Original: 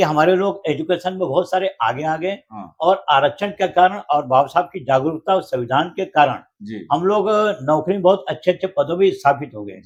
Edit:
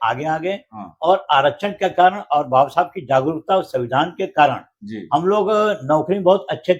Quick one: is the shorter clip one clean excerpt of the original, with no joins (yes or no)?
yes